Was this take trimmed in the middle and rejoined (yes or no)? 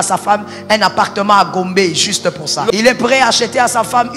yes